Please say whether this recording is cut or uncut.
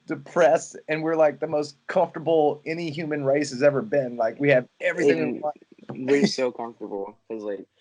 uncut